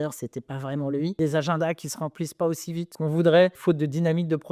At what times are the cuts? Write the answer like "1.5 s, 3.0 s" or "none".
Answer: 1.2 s, 2.9 s, 3.6 s